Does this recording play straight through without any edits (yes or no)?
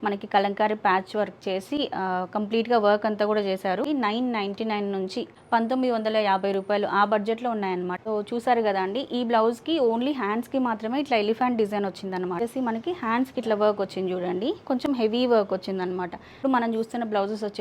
no